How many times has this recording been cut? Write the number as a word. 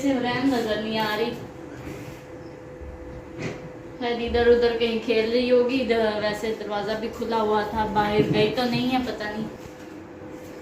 one